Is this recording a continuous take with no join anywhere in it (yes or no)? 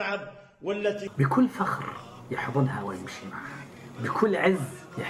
no